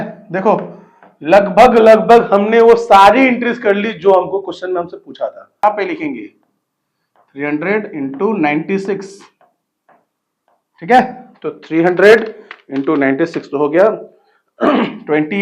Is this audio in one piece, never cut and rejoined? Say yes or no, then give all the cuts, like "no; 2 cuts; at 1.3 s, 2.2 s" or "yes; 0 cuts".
no; 1 cut; at 5.6 s